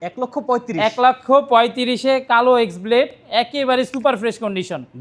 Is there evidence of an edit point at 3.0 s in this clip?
no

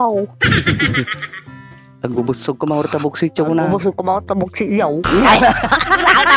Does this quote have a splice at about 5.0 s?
yes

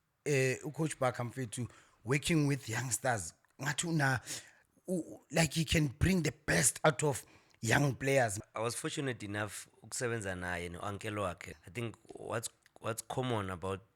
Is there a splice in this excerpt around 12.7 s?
no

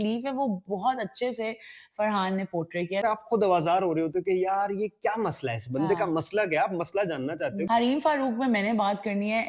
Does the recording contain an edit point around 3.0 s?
yes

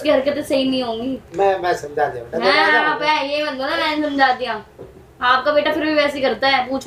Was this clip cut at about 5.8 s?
no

